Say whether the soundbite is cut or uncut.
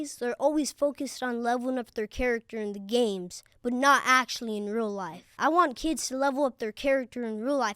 cut